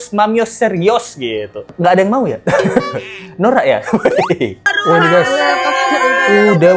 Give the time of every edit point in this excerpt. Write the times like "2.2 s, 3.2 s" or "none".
1.6 s, 4.7 s